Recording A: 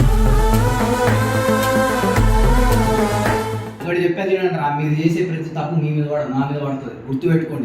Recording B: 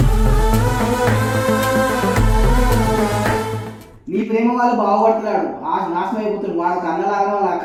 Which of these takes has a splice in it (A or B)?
A